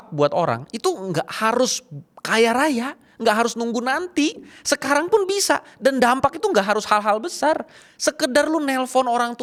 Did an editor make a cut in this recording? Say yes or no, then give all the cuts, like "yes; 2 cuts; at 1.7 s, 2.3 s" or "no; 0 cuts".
no; 0 cuts